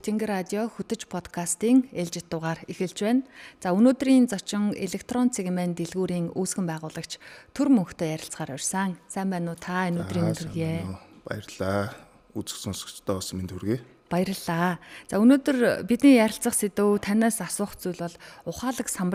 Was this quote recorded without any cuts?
yes; 0 cuts

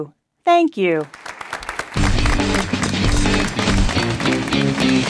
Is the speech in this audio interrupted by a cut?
yes; 1 cut; at 1.4 s

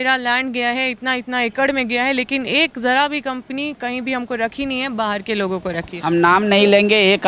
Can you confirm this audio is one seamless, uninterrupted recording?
yes; 0 cuts

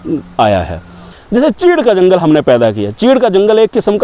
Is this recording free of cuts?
no; 1 cut; at 1.2 s

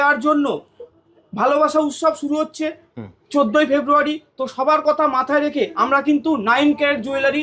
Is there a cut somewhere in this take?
no; 0 cuts

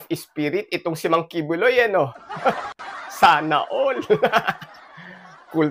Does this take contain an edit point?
no; 0 cuts

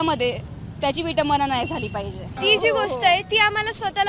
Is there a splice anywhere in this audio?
yes; 1 cut; at 2.3 s

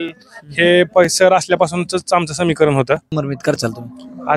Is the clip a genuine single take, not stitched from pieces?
no; 1 cut; at 3.1 s

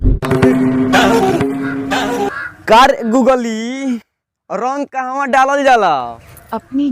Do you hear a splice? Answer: yes; 1 cut; at 1.4 s

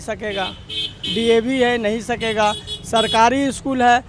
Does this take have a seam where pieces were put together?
no; 0 cuts

